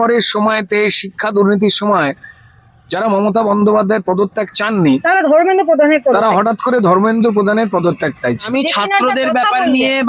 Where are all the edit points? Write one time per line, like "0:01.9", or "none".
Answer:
0:08.5

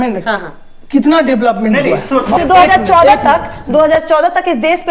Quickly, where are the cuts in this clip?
0:02.4

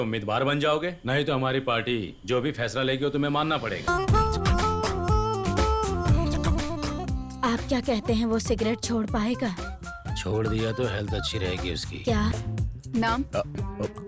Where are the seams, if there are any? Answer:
0:03.8

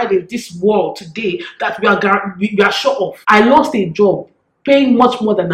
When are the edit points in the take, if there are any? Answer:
0:03.2

